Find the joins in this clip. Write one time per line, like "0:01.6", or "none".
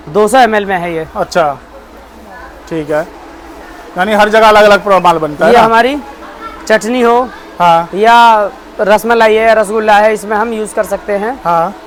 none